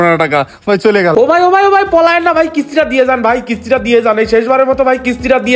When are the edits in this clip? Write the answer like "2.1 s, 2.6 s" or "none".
1.1 s